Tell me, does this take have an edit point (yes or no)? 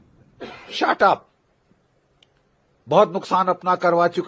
no